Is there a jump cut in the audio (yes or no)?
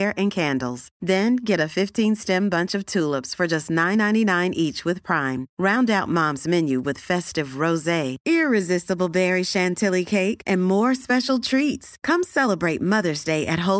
no